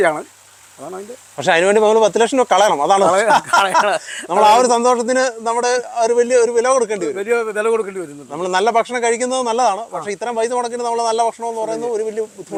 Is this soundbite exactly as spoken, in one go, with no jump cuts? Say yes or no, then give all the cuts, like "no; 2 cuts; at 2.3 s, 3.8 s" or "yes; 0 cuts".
yes; 0 cuts